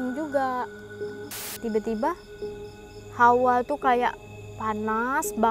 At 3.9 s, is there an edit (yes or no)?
no